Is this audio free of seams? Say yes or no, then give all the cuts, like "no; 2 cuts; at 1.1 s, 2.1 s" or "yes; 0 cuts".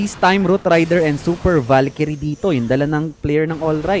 yes; 0 cuts